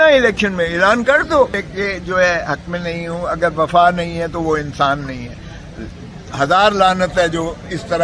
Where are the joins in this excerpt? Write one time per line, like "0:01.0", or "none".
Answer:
0:01.6